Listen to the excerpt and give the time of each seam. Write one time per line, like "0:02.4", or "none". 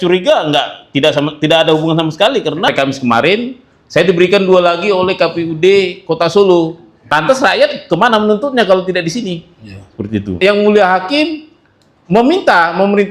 0:02.7
0:07.0
0:10.3